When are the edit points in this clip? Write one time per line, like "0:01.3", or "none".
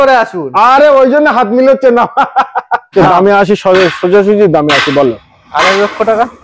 0:02.9